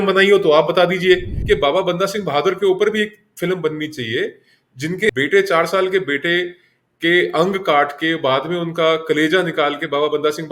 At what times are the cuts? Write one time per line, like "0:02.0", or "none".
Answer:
0:01.3